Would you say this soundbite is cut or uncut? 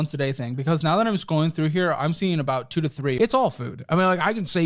cut